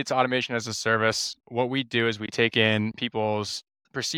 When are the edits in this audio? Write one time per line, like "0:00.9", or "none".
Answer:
0:01.3